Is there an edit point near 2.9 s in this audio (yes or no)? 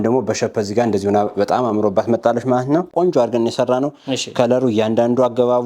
yes